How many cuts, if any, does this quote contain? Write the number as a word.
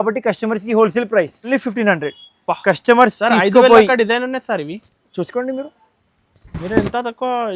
one